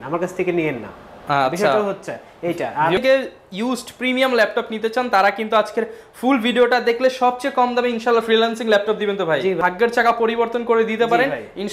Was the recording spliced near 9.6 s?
yes; 2 cuts; at 3.0 s, 9.6 s

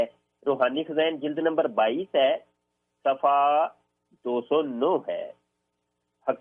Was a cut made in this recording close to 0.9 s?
no; 0 cuts

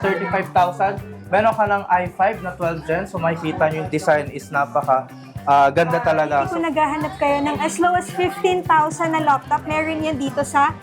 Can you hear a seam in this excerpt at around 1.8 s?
no; 1 cut; at 6.5 s

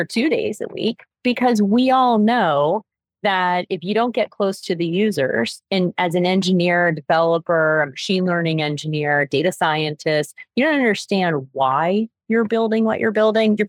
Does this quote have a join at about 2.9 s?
no; 0 cuts

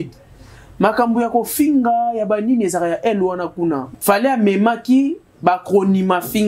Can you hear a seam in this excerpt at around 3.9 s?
yes; 1 cut; at 3.9 s

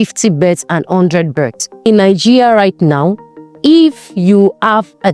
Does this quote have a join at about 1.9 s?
yes; 1 cut; at 1.9 s

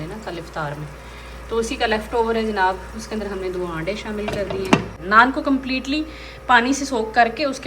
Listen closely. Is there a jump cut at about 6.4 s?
no; 1 cut; at 5.0 s

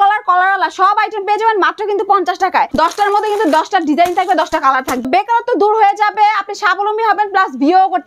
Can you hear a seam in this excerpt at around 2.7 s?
yes; 2 cuts; at 2.7 s, 5.1 s

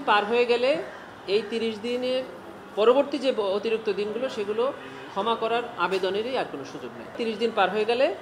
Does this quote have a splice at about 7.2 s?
yes; 1 cut; at 7.2 s

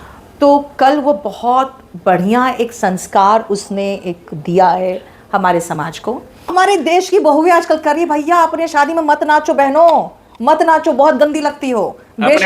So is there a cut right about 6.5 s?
yes; 1 cut; at 6.5 s

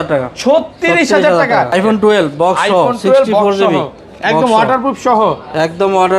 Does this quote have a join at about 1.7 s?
yes; 1 cut; at 1.7 s

